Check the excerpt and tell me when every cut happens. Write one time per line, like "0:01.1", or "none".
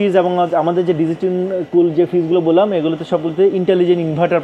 none